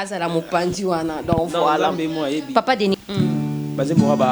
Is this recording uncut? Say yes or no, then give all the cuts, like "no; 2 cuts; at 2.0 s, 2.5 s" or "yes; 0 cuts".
no; 1 cut; at 3.0 s